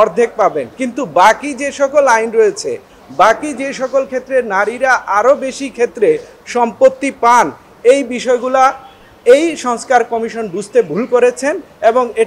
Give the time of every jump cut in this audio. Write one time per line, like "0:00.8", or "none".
none